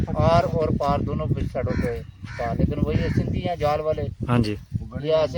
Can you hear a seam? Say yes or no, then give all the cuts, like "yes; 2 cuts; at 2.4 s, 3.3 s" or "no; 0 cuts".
no; 0 cuts